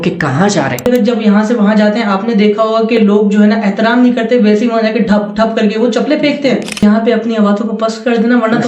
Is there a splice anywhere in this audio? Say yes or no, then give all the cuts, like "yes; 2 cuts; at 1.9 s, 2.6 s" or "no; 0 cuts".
yes; 2 cuts; at 0.9 s, 6.8 s